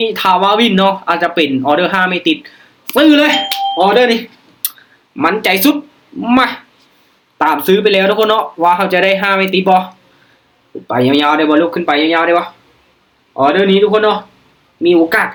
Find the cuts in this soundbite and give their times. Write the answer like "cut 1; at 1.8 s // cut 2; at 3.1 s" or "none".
none